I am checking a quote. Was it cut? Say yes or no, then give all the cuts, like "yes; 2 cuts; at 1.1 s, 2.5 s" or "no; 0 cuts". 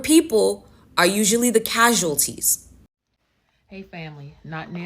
yes; 1 cut; at 2.8 s